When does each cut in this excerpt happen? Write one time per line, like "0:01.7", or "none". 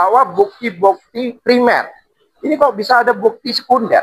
none